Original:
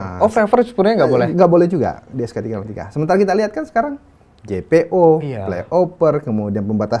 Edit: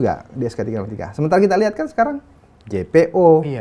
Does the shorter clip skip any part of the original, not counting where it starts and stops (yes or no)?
no